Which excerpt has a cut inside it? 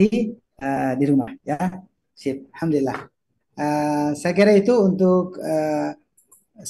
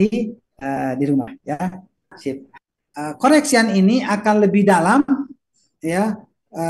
second; 1 cut; at 2.5 s

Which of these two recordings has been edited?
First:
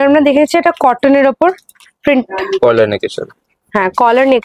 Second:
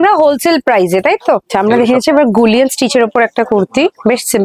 second; 1 cut; at 1.5 s

